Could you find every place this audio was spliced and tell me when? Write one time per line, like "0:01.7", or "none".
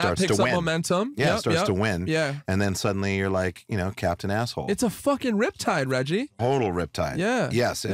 none